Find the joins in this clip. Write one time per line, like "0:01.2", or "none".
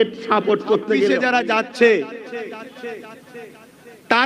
0:01.1